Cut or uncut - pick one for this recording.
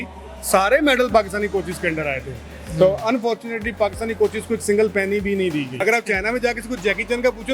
cut